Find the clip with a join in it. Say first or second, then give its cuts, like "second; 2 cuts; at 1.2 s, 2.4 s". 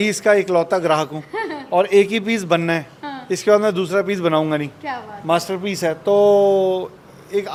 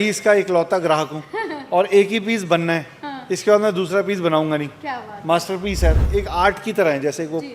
second; 1 cut; at 6.0 s